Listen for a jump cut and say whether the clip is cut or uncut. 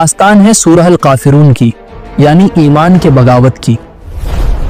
uncut